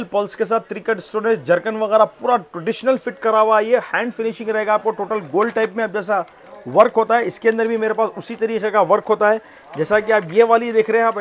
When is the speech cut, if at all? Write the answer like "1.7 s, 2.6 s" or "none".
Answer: none